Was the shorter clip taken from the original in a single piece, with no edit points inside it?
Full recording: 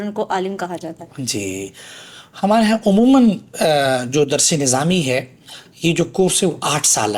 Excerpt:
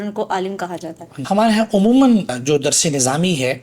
no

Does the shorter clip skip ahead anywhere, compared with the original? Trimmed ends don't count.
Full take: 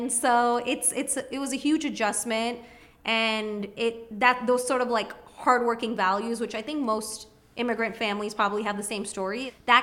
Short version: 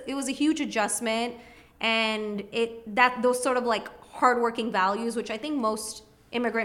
no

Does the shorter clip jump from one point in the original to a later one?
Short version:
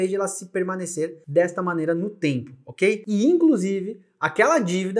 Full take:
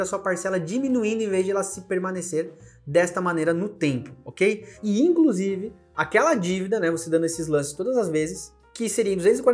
yes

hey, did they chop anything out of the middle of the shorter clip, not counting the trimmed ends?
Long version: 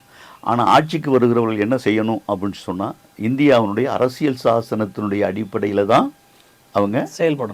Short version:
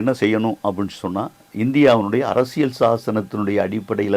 no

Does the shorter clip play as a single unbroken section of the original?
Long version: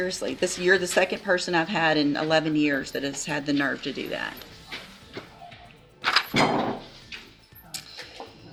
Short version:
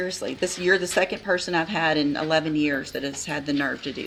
yes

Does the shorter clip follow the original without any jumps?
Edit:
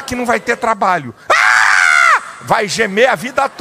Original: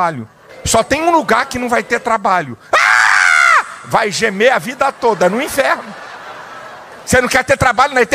yes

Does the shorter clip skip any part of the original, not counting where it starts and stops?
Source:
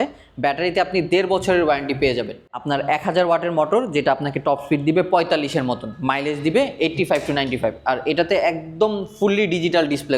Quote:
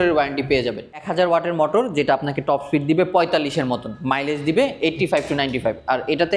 yes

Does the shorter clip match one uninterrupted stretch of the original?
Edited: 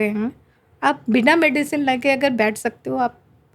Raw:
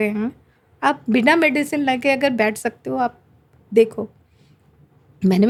yes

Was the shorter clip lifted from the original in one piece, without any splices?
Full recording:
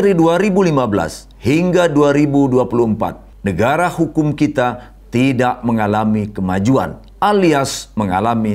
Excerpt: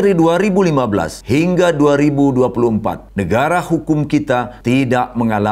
no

